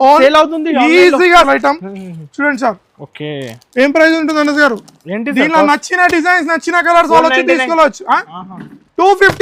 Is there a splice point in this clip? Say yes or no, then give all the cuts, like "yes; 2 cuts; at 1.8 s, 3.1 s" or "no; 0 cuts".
yes; 1 cut; at 1.5 s